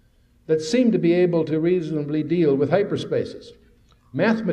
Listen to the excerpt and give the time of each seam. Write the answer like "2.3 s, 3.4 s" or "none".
1.0 s